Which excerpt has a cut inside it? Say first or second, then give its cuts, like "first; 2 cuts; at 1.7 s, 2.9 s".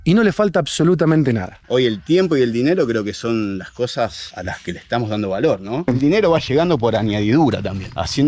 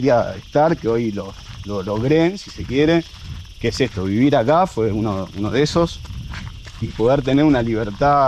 first; 2 cuts; at 1.5 s, 5.8 s